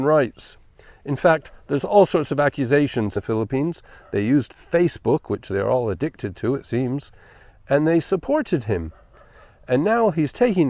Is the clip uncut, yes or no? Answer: yes